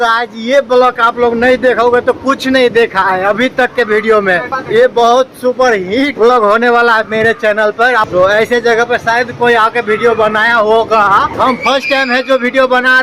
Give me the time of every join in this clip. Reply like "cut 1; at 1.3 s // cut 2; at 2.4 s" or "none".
cut 1; at 4.5 s // cut 2; at 6.1 s // cut 3; at 8.1 s // cut 4; at 11.3 s